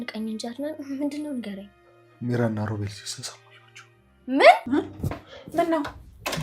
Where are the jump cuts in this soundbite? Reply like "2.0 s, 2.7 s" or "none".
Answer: 4.6 s